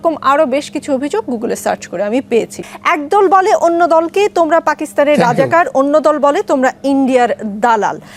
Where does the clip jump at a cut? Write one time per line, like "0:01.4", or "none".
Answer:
0:02.6